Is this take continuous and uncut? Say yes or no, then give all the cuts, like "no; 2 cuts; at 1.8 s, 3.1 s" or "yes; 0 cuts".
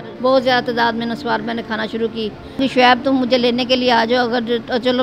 no; 1 cut; at 2.6 s